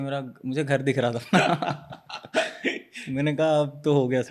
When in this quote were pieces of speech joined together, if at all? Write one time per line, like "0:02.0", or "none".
none